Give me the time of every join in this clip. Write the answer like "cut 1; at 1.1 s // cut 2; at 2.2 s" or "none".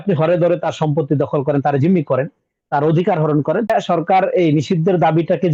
cut 1; at 3.7 s